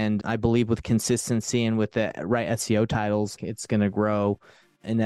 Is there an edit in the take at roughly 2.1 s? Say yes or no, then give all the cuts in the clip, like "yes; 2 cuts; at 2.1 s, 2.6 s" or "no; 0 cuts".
no; 1 cut; at 3.4 s